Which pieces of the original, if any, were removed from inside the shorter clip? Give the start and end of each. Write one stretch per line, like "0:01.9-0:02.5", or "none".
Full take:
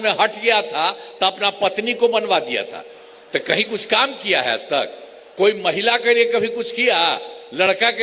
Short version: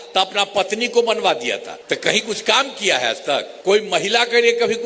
0:02.8-0:03.2
0:05.0-0:05.3